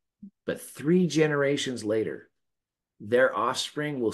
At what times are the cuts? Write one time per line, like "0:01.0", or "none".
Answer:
none

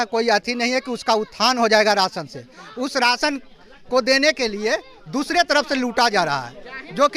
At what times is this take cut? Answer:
none

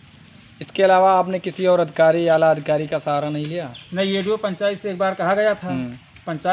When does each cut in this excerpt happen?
none

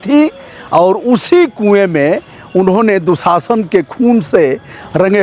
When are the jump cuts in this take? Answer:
none

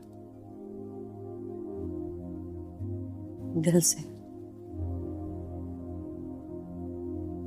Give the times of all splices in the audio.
0:01.4

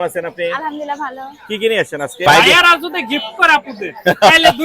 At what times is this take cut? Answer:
0:02.3

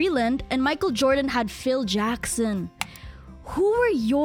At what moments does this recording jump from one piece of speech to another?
none

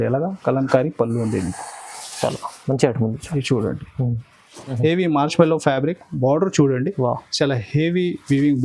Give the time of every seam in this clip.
0:04.6

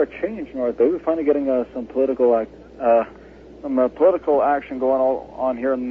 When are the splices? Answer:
0:01.4

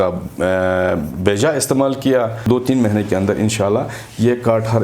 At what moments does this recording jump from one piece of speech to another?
0:02.4

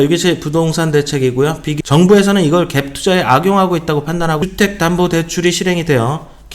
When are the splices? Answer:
0:01.8
0:04.4

